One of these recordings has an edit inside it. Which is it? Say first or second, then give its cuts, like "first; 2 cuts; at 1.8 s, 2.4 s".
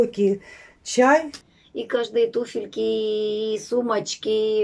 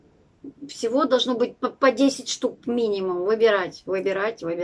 first; 1 cut; at 1.4 s